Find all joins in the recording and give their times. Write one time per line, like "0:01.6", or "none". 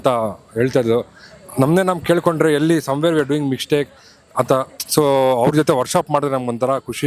none